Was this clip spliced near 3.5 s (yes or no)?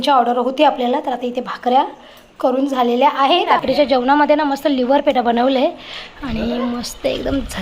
yes